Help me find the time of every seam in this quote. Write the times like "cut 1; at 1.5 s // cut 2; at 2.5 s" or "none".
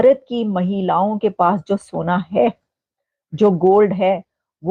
none